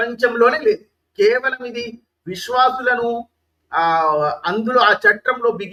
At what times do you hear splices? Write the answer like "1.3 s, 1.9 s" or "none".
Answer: none

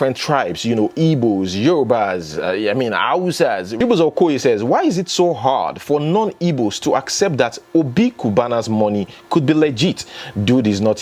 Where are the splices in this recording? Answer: 3.7 s

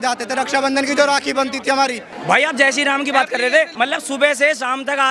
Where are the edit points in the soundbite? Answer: 2.1 s, 3.7 s

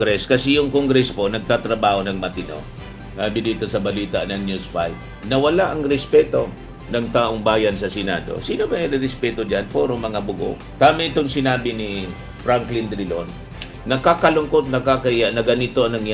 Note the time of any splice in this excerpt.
none

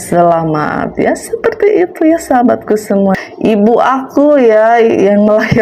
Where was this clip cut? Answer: 3.1 s

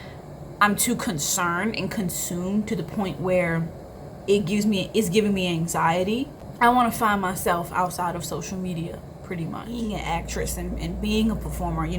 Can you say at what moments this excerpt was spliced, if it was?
6.4 s, 9.7 s

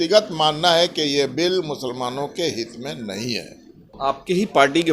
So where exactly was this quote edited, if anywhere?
3.9 s

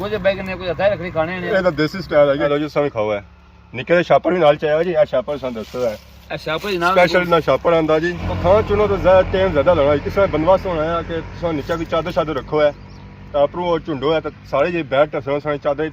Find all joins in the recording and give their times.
2.5 s, 8.2 s

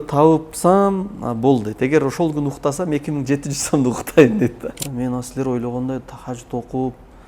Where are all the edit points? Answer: 4.8 s

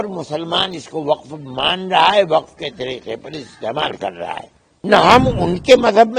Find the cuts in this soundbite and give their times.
4.7 s

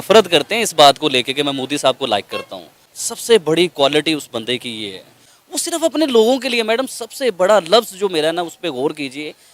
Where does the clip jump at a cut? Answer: none

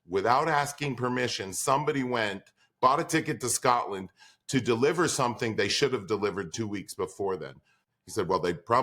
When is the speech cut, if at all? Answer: 7.8 s

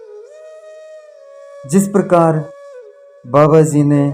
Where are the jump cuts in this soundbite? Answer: 1.7 s

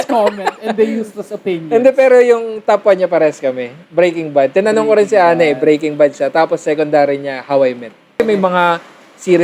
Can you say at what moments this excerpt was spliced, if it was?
8.2 s

